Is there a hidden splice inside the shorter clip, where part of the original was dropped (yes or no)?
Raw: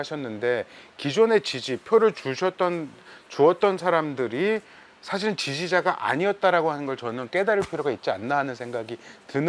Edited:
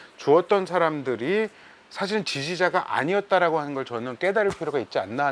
no